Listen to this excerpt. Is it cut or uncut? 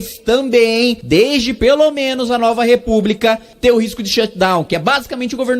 cut